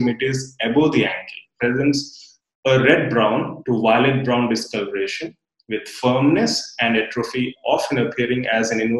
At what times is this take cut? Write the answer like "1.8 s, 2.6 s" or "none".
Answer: 1.5 s